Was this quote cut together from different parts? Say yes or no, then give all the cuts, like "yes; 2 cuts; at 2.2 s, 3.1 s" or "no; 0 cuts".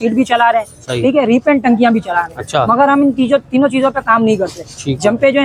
no; 0 cuts